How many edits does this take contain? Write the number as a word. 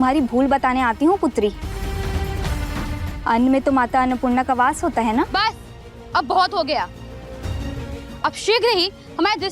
one